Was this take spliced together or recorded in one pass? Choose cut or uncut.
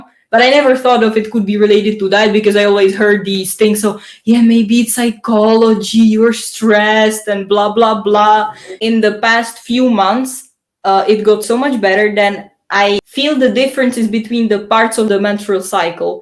cut